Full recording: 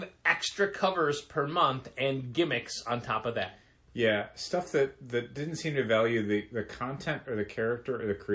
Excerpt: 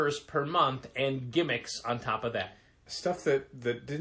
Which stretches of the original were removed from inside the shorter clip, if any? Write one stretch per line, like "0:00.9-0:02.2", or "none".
0:03.9-0:04.3